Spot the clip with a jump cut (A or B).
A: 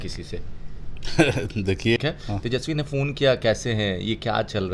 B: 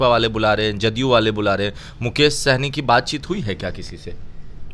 A